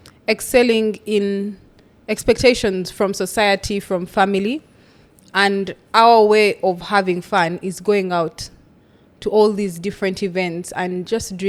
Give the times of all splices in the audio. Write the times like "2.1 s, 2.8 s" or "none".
none